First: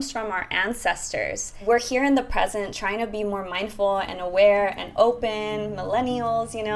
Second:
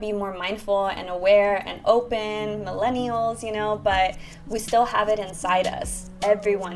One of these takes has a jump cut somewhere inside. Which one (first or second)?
first